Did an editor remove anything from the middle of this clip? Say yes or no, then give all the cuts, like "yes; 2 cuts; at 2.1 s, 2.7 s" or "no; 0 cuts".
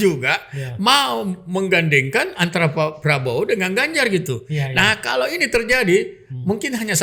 no; 0 cuts